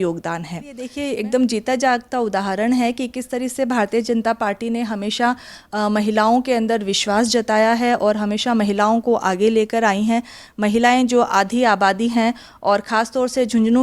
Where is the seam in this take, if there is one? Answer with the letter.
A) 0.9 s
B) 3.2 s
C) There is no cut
A